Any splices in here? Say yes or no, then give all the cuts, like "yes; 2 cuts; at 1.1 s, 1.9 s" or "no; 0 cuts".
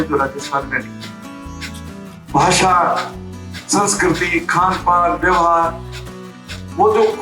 no; 0 cuts